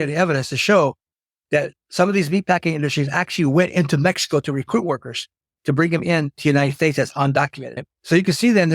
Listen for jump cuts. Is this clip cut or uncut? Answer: uncut